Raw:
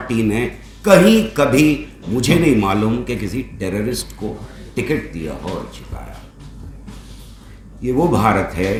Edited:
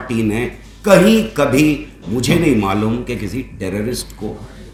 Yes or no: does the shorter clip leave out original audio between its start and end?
no